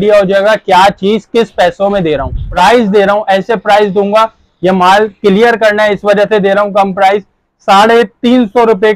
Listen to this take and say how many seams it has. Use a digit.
1